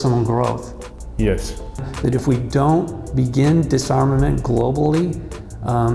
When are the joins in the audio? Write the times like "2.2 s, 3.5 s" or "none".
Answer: 1.9 s